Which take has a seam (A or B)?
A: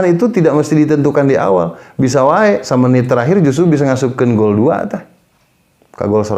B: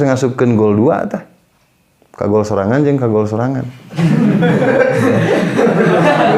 A